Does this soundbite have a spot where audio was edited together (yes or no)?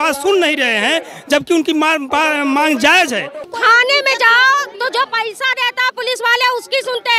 yes